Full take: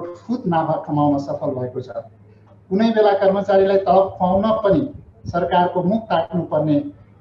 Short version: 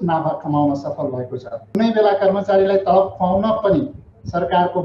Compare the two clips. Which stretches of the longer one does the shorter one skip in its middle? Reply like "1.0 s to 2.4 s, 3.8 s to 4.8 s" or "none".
2.1 s to 2.7 s